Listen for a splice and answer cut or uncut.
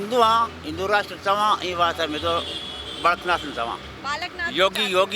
uncut